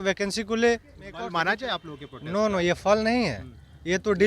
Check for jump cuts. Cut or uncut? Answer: cut